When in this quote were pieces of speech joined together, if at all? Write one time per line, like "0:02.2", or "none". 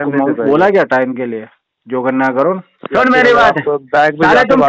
0:02.7